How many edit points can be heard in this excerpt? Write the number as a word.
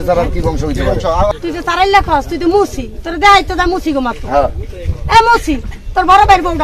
one